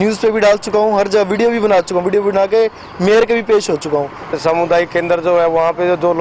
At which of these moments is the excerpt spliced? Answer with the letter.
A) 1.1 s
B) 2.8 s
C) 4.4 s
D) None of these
C